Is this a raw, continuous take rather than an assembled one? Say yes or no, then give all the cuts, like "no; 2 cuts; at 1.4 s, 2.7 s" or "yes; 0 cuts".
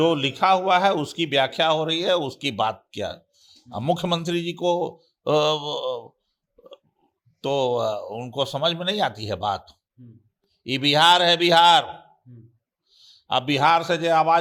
yes; 0 cuts